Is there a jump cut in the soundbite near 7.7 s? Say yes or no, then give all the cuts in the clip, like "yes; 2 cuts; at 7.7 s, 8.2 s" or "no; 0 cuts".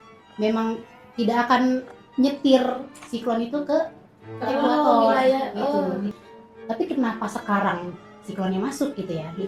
no; 1 cut; at 6.1 s